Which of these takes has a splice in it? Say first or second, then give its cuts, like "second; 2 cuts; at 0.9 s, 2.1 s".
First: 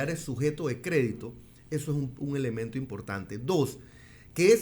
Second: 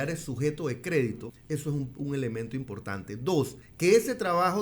second; 2 cuts; at 1.3 s, 3.6 s